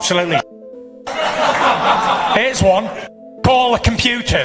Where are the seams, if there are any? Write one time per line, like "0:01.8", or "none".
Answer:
none

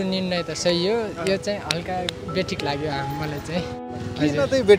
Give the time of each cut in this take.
0:03.8

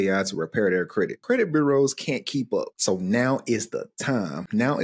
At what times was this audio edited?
0:01.2
0:02.7

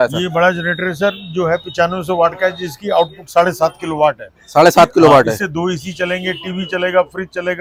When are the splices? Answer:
none

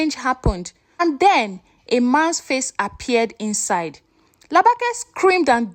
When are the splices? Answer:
0:01.0

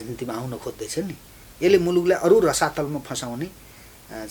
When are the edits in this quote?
none

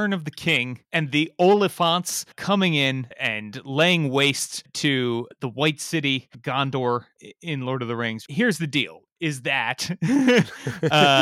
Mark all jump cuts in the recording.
0:00.8
0:03.1
0:07.1

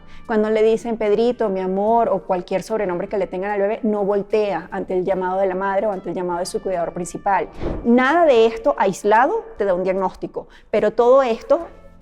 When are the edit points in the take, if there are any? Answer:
0:07.6

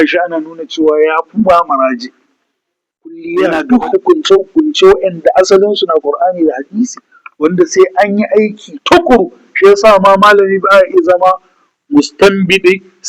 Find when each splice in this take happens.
0:03.2

